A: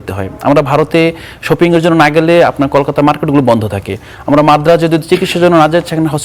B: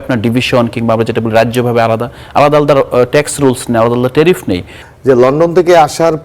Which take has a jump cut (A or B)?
B